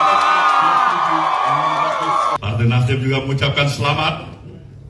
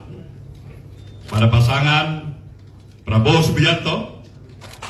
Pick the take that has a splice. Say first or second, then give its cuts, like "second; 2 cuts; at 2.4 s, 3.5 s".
first; 1 cut; at 2.3 s